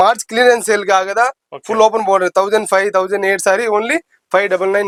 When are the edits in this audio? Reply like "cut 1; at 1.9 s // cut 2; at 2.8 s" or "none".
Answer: none